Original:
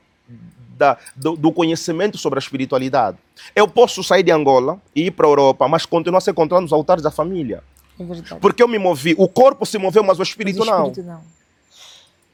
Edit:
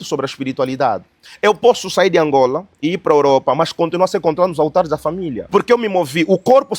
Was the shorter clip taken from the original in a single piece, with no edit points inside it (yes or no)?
no